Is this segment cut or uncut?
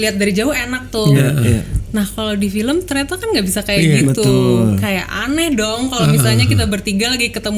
uncut